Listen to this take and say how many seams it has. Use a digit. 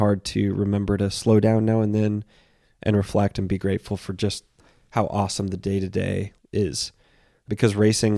2